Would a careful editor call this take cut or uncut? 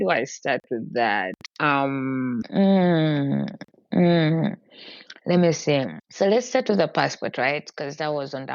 cut